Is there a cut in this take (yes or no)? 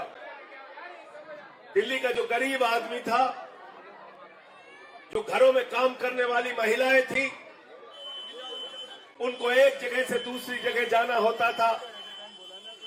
no